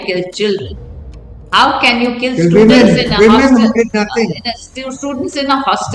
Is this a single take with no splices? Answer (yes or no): yes